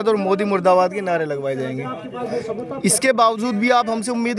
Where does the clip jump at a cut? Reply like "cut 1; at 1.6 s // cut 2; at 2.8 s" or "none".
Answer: none